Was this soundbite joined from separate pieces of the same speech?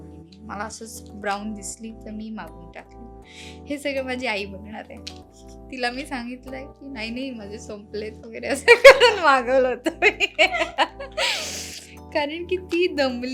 no; 0 cuts

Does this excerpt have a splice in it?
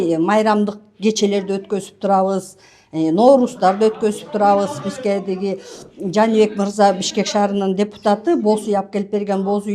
no; 0 cuts

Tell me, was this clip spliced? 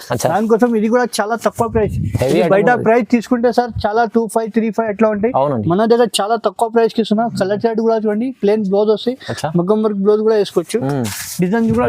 no; 0 cuts

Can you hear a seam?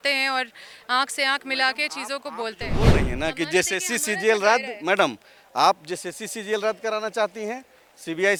no; 0 cuts

